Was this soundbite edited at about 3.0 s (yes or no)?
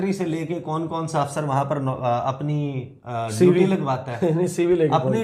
no